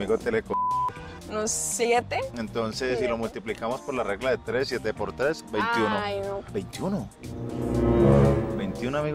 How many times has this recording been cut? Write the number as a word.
two